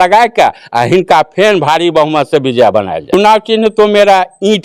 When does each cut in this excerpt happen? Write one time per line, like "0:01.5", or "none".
0:03.0